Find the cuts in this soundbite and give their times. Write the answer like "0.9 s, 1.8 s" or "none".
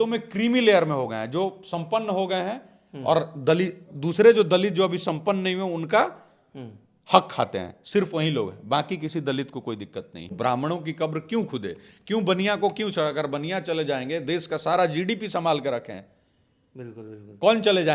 10.3 s